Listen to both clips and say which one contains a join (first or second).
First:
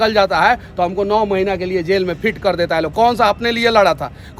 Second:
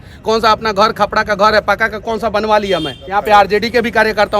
second